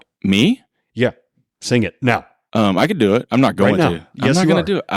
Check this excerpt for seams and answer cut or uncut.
cut